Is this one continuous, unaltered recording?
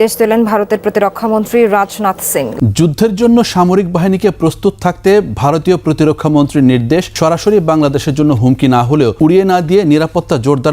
no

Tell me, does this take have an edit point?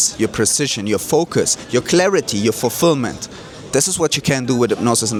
no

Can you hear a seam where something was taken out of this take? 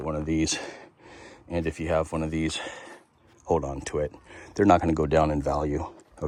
no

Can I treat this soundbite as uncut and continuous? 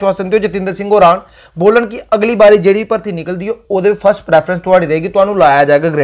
yes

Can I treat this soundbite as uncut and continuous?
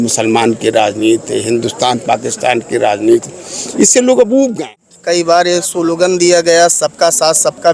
no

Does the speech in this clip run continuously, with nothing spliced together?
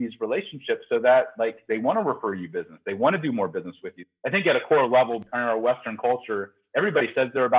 no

